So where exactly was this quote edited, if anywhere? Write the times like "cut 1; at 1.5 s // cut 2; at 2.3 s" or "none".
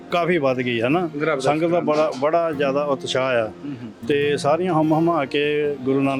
none